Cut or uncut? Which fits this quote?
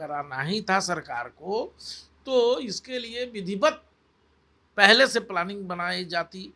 uncut